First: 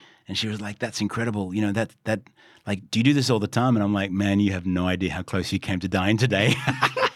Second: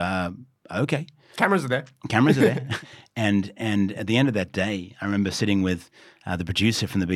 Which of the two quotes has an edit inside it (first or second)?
second